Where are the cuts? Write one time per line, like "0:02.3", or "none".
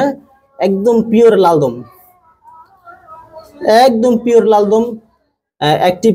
none